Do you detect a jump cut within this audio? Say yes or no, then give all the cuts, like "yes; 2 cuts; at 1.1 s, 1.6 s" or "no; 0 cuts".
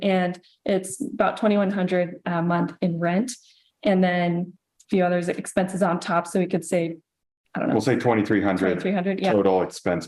no; 0 cuts